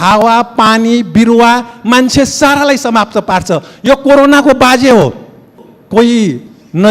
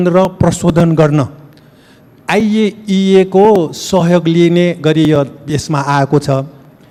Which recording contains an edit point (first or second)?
first